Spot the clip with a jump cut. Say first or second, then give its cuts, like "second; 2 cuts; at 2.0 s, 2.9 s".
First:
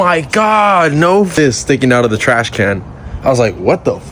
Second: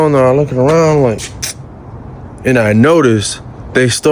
first; 1 cut; at 1.3 s